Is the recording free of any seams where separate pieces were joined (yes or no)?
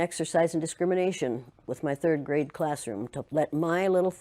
no